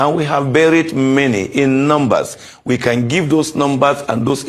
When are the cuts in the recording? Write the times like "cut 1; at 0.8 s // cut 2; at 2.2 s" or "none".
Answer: none